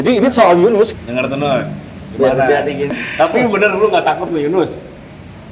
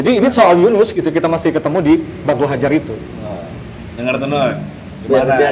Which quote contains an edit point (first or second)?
first